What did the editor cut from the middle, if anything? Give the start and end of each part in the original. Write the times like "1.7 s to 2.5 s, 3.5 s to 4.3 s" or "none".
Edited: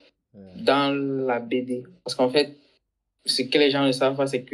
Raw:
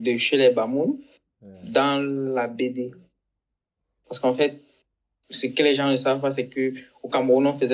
3.0 s to 4.0 s